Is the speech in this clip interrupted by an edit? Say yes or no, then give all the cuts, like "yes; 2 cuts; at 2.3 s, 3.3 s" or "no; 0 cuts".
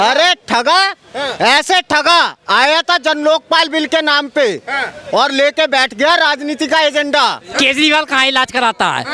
yes; 1 cut; at 7.4 s